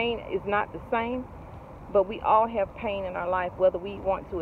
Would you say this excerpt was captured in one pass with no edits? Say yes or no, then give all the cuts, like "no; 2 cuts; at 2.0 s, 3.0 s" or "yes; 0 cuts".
yes; 0 cuts